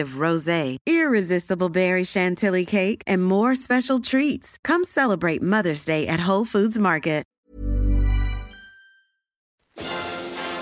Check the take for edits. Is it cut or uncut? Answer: cut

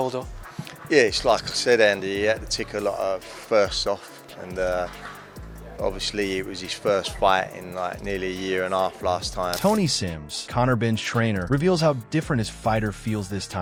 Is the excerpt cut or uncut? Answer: uncut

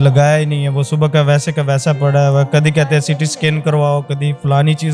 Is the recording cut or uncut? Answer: uncut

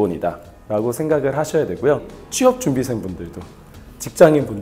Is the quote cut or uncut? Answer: cut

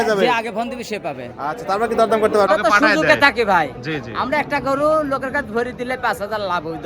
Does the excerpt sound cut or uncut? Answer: cut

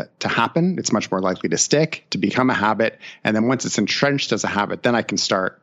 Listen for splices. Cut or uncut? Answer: uncut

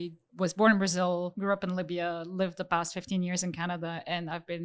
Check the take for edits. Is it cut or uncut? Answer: cut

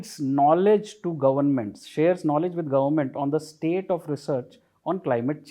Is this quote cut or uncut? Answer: uncut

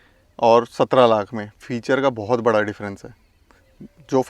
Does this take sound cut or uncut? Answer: uncut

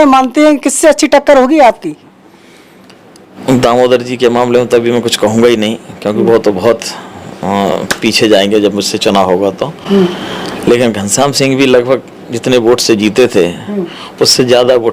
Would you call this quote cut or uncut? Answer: cut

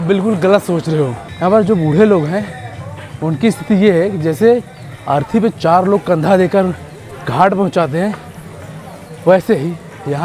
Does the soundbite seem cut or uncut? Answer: cut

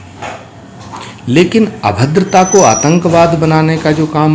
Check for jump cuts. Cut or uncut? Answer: uncut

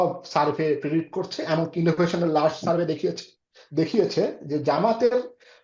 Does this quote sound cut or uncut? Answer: uncut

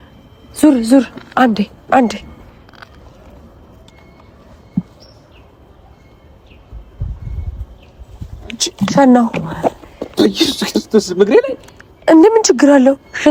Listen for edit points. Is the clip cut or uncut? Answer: uncut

